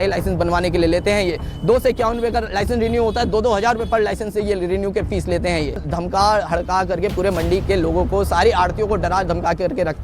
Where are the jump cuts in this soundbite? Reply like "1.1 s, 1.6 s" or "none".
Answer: 5.9 s